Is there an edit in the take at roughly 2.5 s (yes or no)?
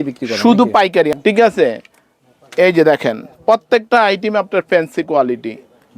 no